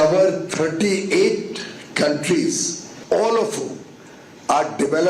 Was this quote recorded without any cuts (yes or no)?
no